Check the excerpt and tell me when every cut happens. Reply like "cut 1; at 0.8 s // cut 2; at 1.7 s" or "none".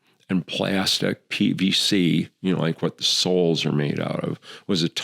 none